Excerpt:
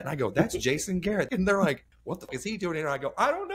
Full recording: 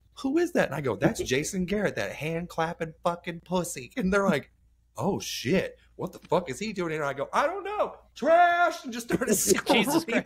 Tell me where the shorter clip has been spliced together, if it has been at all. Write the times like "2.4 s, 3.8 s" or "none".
1.3 s, 2.3 s